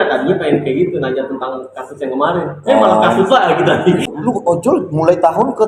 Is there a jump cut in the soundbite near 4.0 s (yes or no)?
yes